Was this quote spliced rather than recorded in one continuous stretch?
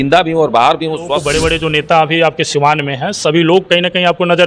yes; 1 cut; at 1.3 s

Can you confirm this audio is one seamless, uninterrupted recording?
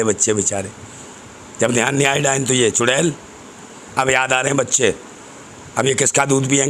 yes; 0 cuts

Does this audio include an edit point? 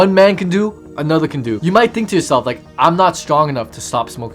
yes; 1 cut; at 1.5 s

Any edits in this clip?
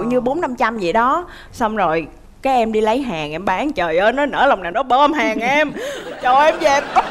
no; 0 cuts

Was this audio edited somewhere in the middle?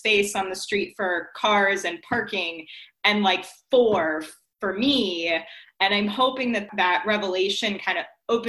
yes; 1 cut; at 6.7 s

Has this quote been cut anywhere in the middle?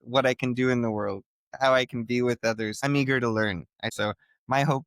yes; 2 cuts; at 2.8 s, 3.9 s

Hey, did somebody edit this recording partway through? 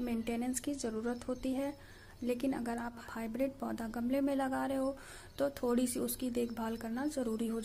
yes; 1 cut; at 3.0 s

